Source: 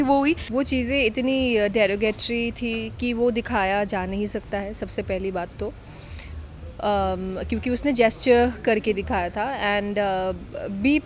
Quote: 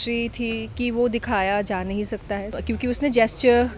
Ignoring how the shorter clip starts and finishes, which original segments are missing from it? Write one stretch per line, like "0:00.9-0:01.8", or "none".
0:04.8-0:07.4